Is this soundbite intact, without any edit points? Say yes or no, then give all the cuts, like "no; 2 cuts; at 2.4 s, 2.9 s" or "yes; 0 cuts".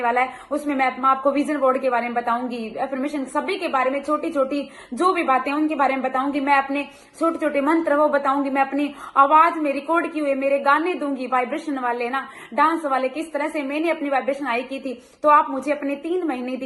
yes; 0 cuts